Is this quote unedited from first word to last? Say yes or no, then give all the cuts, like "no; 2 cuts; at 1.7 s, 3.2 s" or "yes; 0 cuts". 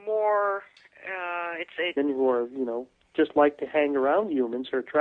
yes; 0 cuts